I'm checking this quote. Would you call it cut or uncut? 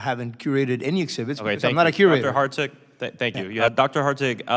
cut